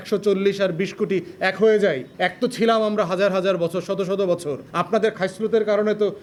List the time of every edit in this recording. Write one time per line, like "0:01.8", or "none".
none

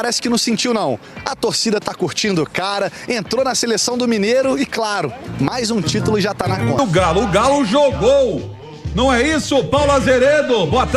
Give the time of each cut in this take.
0:06.8

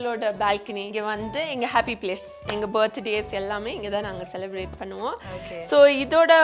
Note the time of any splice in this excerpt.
none

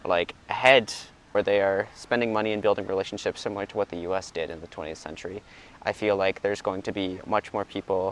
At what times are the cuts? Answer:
0:01.3

